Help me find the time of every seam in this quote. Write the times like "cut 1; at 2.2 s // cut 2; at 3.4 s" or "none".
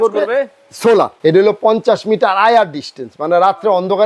cut 1; at 1.1 s